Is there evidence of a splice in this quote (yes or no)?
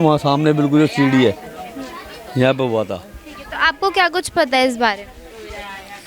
no